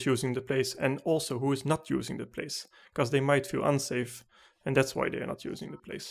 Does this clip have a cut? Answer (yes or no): no